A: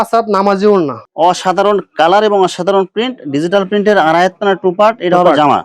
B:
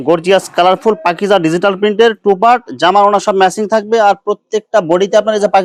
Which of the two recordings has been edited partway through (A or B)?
A